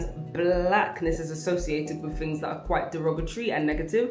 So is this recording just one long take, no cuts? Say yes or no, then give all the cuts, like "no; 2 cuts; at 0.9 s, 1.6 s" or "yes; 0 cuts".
yes; 0 cuts